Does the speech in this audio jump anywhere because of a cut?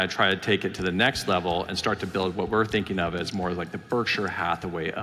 no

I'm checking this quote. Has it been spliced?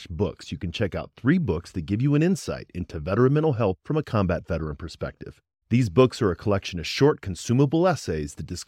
no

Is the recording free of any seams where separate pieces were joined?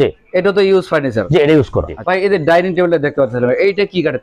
no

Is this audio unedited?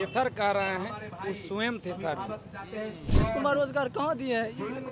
no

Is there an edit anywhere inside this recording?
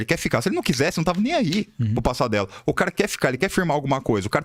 no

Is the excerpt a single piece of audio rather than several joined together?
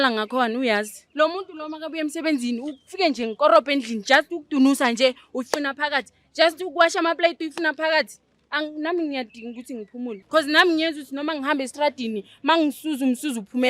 no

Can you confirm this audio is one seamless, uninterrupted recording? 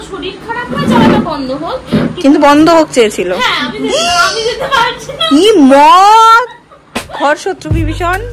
yes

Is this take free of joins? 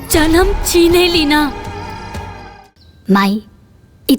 no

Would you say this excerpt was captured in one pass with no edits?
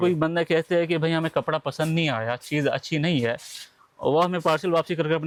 yes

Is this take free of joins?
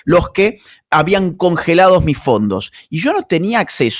yes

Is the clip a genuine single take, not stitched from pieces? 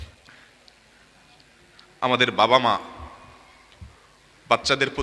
yes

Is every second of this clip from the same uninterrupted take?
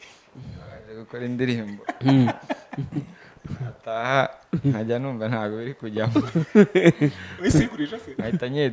yes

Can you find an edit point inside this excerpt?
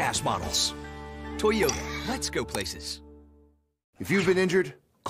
yes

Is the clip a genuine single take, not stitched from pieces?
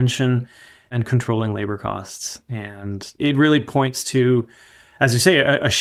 yes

